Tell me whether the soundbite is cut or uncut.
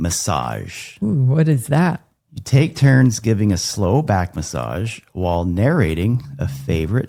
uncut